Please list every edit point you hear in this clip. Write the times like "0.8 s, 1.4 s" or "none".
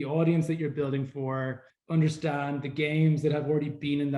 1.7 s